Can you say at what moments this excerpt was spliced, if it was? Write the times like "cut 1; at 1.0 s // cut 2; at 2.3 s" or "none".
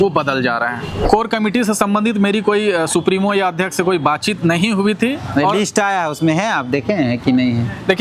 cut 1; at 1.0 s